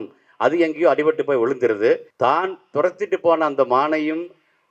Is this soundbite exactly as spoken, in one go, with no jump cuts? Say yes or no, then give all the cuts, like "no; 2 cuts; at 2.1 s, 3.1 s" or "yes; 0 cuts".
no; 1 cut; at 2.1 s